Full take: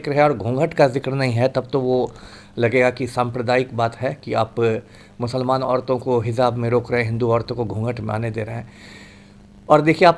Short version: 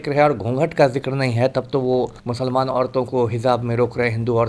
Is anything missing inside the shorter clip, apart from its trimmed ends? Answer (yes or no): yes